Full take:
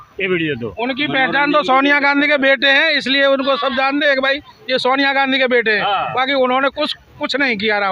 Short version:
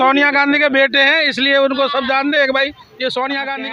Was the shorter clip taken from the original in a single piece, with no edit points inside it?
yes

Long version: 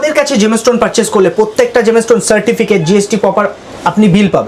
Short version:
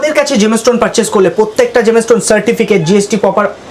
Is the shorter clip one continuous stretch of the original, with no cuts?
yes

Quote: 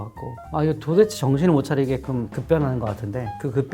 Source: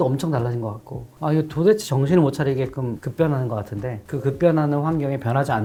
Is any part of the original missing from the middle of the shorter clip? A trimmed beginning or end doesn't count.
no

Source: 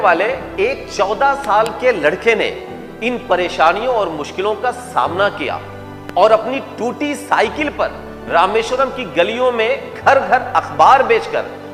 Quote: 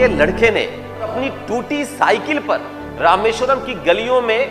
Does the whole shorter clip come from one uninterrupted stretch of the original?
no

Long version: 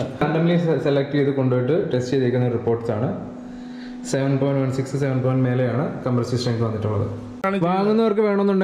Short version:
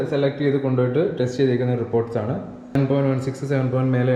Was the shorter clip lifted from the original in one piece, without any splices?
no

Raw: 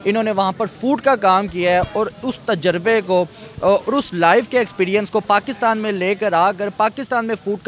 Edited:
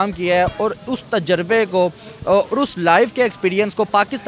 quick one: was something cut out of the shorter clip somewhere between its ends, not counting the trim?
no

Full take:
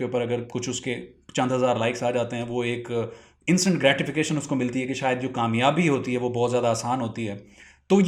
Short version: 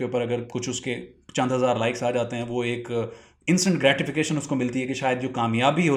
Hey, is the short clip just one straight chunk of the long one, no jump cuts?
yes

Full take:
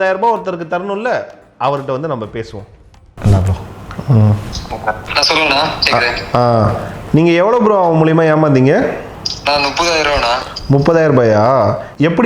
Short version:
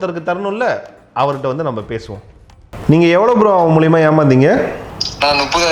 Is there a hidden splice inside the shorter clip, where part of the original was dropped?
yes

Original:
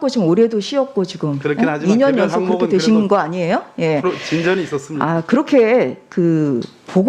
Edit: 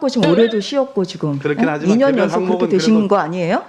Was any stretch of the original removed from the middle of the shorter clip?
no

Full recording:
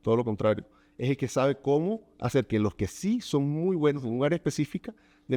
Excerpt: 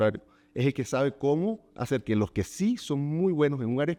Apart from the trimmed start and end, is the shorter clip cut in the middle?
no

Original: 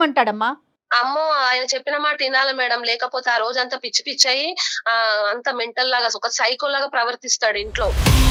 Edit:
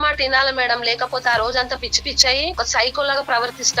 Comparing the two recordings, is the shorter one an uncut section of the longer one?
no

